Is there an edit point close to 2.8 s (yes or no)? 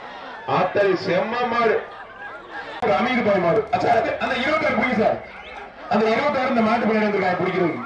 yes